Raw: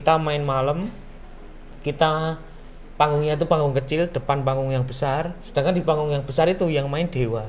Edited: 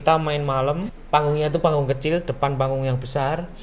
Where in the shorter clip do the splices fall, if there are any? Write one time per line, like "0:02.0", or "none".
0:00.9